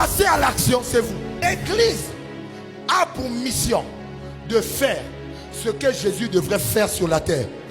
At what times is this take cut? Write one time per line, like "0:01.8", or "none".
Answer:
0:01.4